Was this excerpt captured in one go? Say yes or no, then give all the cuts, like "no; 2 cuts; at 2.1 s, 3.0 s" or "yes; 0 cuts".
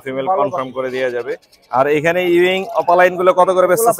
yes; 0 cuts